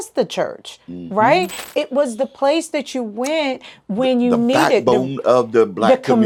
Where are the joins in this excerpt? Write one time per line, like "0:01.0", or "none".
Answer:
none